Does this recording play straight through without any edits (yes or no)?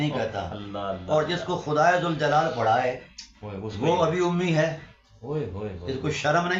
yes